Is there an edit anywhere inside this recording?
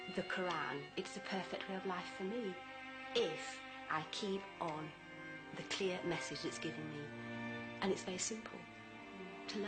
no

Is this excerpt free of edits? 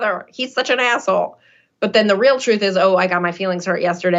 yes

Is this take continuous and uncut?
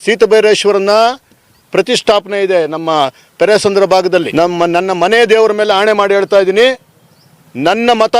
no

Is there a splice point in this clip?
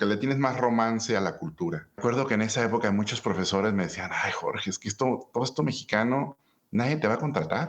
yes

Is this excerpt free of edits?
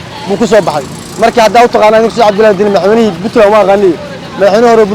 yes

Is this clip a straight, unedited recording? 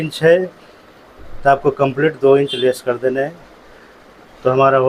yes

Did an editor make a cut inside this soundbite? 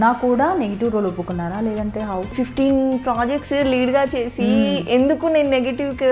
yes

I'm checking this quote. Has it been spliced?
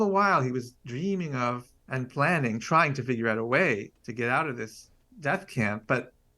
yes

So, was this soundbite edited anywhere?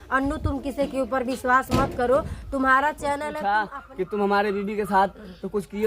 yes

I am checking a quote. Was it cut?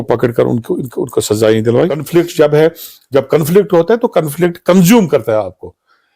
yes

